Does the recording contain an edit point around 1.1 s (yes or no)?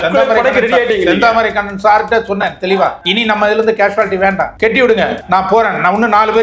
no